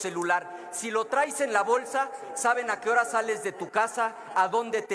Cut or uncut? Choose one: uncut